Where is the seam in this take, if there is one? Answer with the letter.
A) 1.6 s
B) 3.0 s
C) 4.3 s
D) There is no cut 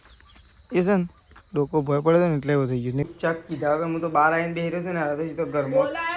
B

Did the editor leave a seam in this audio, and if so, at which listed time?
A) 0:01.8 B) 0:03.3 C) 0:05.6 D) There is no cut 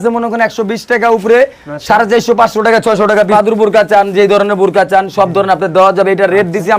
B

